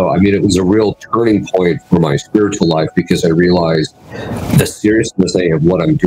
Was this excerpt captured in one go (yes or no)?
yes